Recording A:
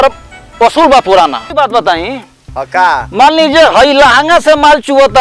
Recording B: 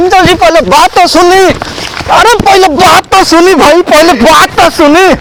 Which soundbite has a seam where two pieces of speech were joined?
A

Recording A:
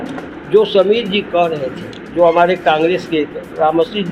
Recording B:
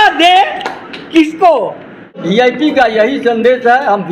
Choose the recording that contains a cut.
B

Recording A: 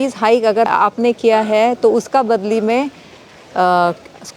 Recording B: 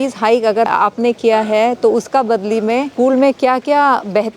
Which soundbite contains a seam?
B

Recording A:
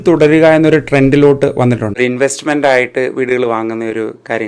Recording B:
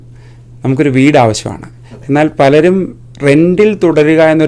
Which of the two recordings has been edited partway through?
A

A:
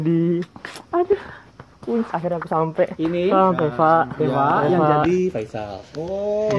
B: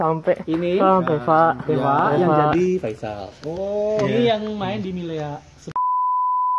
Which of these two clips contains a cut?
B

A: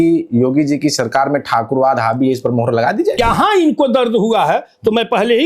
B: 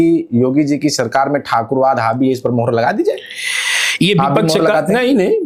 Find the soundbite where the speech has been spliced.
A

